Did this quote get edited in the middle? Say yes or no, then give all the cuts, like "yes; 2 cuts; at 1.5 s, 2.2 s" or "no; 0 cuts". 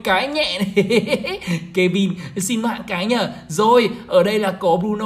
no; 0 cuts